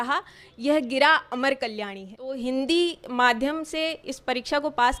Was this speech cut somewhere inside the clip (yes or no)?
yes